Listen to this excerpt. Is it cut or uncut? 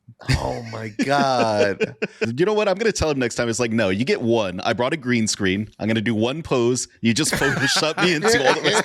cut